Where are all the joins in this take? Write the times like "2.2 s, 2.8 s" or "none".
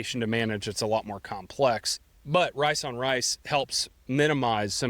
2.2 s

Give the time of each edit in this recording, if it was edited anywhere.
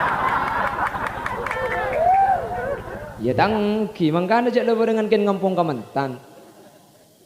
3.1 s

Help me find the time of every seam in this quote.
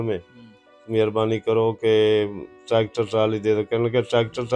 none

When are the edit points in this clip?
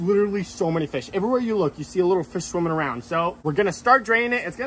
none

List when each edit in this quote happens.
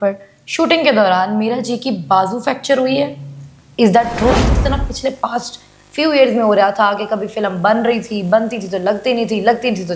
4.6 s

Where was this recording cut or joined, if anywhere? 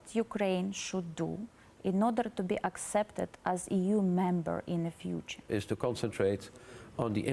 5.5 s

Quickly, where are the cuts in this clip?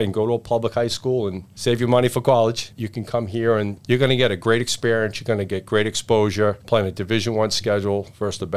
1.5 s, 3.8 s, 6.6 s

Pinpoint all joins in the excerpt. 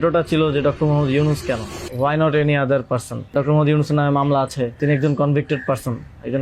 1.8 s, 3.3 s, 4.8 s

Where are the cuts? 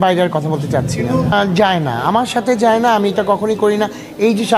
none

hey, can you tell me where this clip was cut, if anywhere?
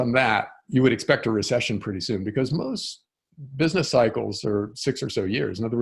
none

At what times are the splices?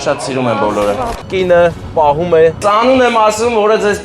1.1 s, 2.6 s

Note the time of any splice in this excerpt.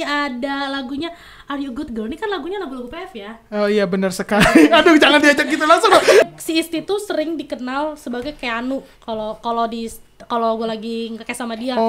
6.2 s

